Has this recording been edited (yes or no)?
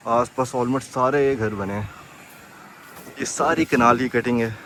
no